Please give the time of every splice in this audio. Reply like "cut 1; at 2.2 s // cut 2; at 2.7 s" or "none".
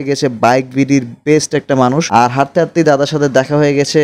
cut 1; at 2.0 s